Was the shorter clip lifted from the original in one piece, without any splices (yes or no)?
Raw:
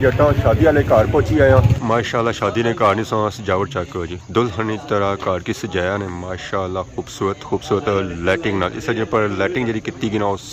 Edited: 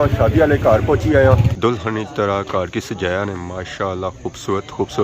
no